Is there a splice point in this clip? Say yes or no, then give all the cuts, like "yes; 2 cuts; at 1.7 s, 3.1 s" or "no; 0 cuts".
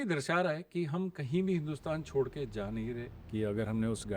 yes; 1 cut; at 3.2 s